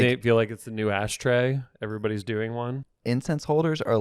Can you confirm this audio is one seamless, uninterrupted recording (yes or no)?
no